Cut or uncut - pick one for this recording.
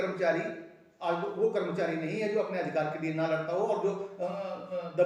uncut